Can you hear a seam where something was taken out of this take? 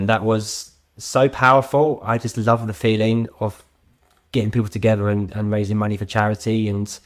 no; 0 cuts

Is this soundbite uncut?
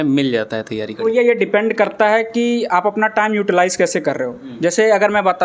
yes; 0 cuts

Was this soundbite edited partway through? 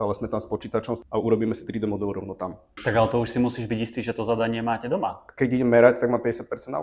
yes; 3 cuts; at 1.0 s, 2.8 s, 5.2 s

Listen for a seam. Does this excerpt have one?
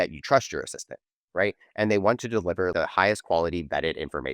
yes; 1 cut; at 2.7 s

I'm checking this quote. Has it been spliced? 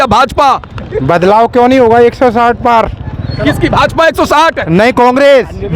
no; 0 cuts

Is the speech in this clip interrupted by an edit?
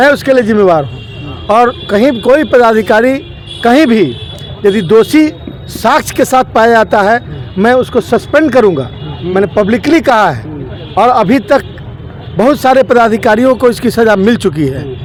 no; 0 cuts

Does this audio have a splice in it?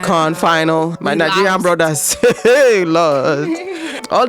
yes; 1 cut; at 0.9 s

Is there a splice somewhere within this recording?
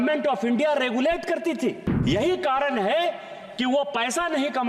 yes; 1 cut; at 1.9 s

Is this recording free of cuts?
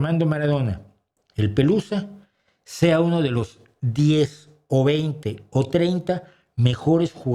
yes; 0 cuts

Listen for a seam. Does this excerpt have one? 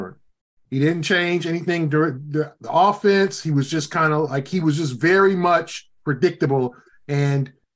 no; 0 cuts

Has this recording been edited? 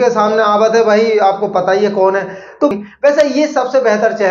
yes; 1 cut; at 2.7 s

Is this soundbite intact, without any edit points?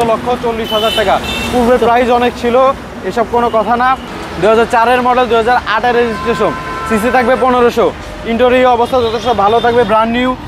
no; 1 cut; at 4.1 s

